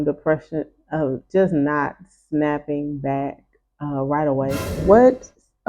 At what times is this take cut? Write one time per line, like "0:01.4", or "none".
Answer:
0:04.8